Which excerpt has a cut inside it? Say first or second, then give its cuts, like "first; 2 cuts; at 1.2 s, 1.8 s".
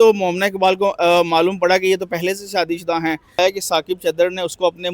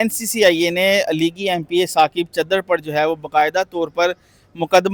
first; 1 cut; at 3.4 s